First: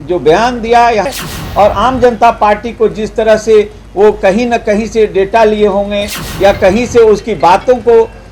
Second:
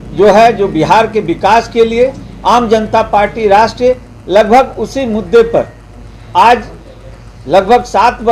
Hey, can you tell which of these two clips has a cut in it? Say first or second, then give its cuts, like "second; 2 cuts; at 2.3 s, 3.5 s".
first; 1 cut; at 1.1 s